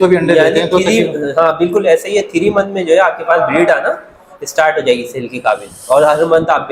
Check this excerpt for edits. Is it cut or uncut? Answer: uncut